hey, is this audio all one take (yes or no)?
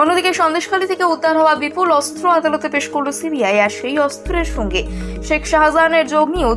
yes